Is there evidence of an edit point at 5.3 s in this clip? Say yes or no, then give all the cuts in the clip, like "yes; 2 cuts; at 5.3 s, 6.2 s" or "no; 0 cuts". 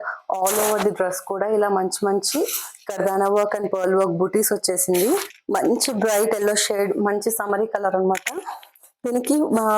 yes; 1 cut; at 5.3 s